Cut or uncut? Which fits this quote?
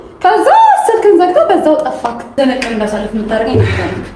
cut